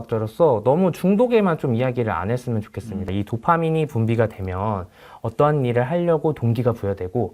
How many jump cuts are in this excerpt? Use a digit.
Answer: 1